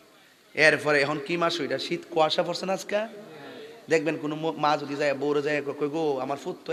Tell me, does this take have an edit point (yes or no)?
no